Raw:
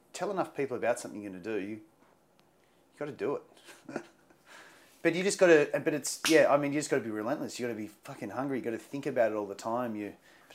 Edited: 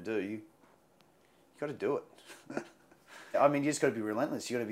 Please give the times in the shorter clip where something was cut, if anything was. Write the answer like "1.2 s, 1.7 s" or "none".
3.4 s